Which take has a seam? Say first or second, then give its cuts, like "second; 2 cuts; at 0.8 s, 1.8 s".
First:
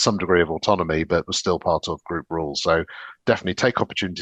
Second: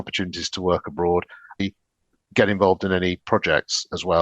second; 1 cut; at 1.6 s